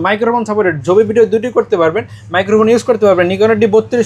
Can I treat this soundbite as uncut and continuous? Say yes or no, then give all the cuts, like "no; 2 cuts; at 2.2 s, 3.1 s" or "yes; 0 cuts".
yes; 0 cuts